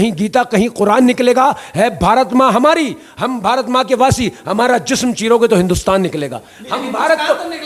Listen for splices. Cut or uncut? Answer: uncut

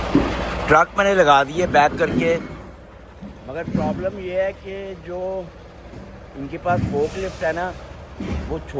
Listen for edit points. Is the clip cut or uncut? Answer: uncut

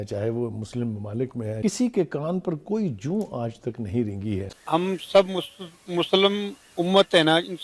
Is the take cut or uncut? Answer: cut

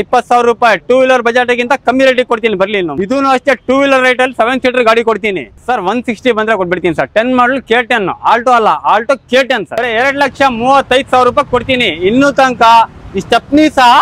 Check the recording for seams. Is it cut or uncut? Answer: cut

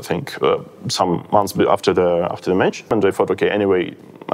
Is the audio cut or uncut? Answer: cut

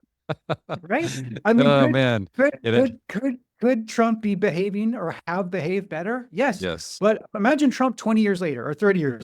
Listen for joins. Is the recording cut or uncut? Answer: cut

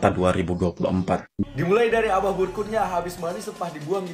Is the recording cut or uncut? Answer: cut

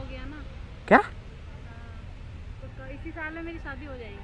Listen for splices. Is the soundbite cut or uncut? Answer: cut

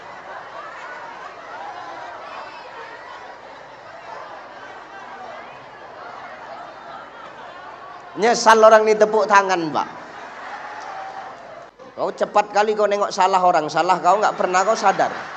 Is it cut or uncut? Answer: cut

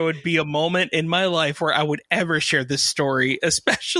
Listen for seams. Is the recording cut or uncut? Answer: uncut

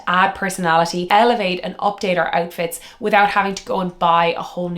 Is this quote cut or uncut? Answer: cut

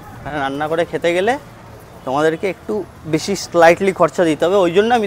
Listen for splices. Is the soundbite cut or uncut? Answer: uncut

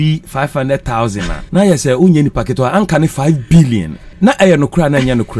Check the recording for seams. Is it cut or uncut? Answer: cut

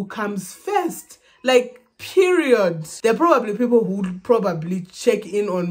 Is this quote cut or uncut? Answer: cut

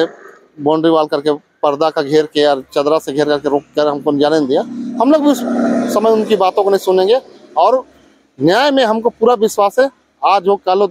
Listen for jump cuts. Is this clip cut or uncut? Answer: uncut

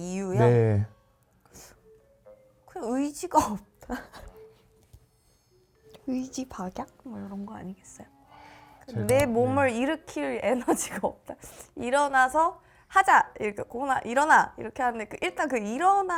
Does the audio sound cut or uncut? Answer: uncut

